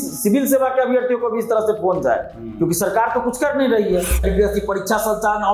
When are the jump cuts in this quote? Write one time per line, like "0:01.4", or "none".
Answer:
0:04.2